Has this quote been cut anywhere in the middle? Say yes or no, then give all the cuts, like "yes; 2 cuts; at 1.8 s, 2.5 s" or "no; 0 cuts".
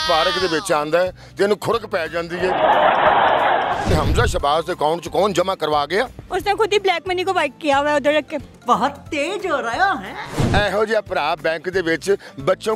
yes; 3 cuts; at 3.9 s, 6.2 s, 10.5 s